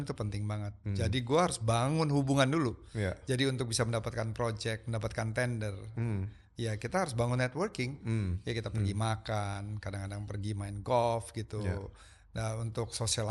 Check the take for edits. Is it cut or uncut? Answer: uncut